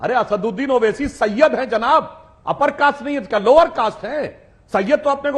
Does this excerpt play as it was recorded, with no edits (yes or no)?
yes